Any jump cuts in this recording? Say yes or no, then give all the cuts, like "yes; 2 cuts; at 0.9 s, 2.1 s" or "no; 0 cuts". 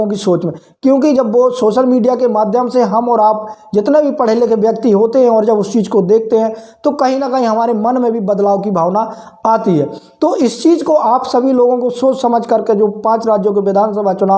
no; 0 cuts